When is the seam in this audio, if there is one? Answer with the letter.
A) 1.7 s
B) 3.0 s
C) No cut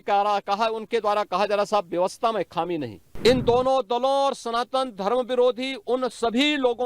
B